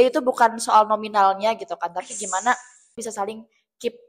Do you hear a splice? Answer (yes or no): yes